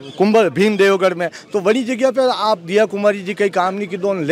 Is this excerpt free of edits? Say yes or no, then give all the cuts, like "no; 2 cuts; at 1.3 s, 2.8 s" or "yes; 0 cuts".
yes; 0 cuts